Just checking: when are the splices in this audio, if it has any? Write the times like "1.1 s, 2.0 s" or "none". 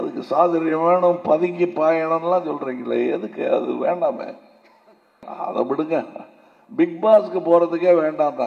5.3 s